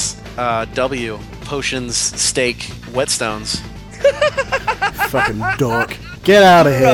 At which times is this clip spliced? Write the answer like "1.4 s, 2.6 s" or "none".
1.3 s, 2.7 s

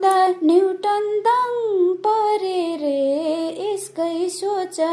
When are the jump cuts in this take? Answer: none

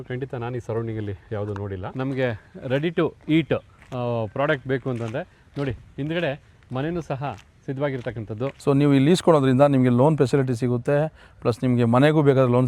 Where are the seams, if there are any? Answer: 1.8 s, 8.6 s

